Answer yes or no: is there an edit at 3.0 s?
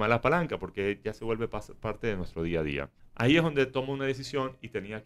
yes